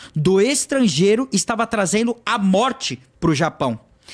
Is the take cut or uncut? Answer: uncut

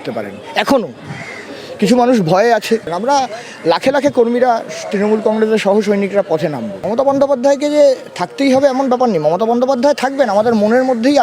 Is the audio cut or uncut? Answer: cut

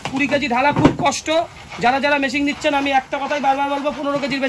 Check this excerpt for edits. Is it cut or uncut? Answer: uncut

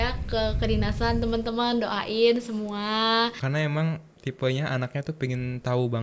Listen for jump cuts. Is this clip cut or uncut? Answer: cut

